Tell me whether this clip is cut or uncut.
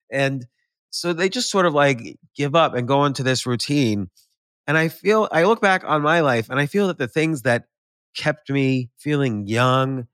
cut